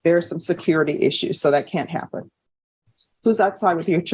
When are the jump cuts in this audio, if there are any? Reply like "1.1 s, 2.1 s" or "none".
none